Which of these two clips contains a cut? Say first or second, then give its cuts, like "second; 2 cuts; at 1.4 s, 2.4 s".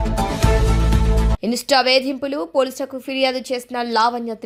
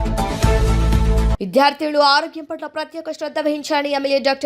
second; 1 cut; at 1.3 s